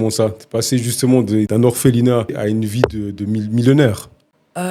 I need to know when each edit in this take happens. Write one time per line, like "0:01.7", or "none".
0:01.5
0:02.4